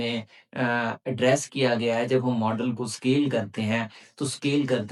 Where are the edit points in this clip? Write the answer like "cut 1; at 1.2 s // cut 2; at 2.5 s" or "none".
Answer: none